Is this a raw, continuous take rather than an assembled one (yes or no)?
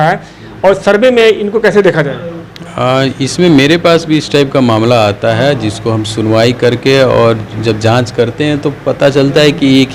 yes